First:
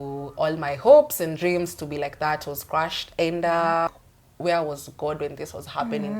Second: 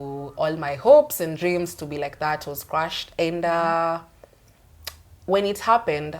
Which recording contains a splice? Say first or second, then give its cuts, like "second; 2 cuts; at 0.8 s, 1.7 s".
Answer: first; 1 cut; at 3.9 s